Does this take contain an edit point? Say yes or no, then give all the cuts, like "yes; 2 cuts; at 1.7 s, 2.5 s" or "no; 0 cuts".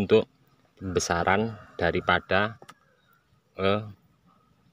no; 0 cuts